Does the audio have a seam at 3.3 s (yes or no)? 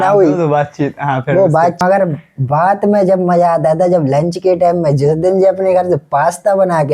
no